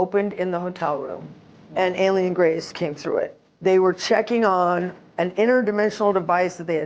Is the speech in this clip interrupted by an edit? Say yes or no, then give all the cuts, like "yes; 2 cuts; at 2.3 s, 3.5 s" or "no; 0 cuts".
yes; 1 cut; at 3.5 s